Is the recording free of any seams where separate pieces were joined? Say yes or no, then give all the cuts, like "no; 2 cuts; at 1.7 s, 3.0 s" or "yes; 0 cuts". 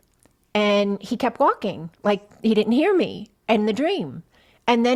yes; 0 cuts